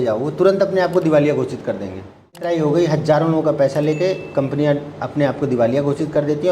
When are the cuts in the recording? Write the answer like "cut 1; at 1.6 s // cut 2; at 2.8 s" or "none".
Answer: cut 1; at 2.4 s